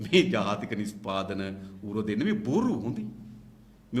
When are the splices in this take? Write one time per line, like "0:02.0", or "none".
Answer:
none